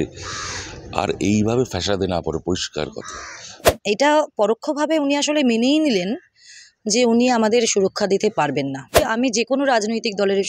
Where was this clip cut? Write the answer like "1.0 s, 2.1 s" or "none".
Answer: 3.6 s, 9.0 s